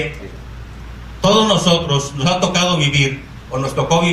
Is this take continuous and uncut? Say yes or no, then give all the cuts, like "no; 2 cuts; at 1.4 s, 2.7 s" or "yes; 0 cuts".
yes; 0 cuts